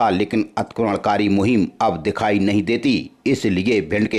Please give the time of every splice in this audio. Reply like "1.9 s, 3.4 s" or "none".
none